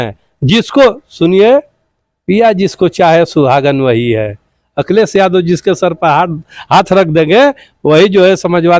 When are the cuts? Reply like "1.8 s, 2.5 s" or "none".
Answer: none